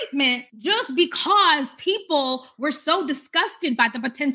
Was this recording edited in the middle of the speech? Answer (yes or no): no